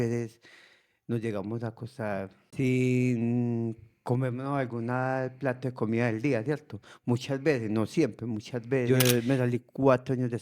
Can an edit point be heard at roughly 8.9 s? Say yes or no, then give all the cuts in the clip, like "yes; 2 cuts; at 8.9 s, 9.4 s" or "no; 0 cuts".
yes; 2 cuts; at 2.4 s, 8.9 s